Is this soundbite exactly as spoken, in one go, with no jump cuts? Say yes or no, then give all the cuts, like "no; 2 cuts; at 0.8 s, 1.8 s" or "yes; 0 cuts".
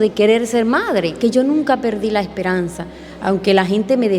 no; 1 cut; at 1.2 s